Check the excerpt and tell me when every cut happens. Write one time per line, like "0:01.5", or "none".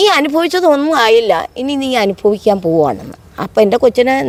none